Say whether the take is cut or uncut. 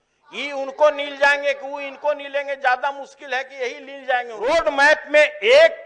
cut